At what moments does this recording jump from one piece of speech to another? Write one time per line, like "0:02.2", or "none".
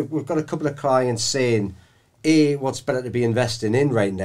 none